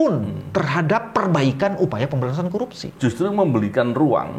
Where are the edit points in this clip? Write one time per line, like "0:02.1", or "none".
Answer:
0:02.9